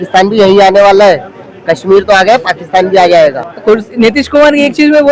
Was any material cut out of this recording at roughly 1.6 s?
no; 1 cut; at 3.4 s

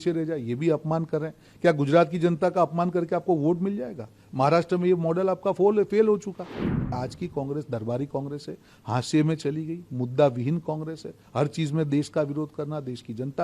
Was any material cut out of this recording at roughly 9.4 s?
no; 1 cut; at 6.9 s

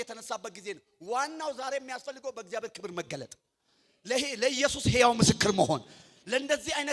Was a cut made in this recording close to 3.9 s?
no; 0 cuts

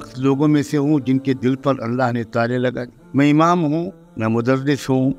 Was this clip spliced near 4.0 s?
yes; 2 cuts; at 2.9 s, 4.0 s

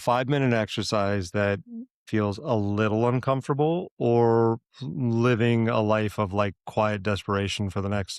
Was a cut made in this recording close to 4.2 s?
no; 1 cut; at 2.0 s

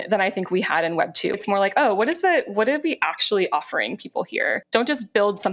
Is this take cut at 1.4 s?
yes; 2 cuts; at 1.4 s, 4.6 s

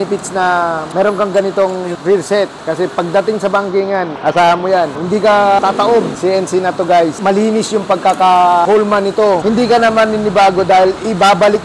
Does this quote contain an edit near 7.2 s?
yes; 3 cuts; at 6.1 s, 7.2 s, 9.4 s

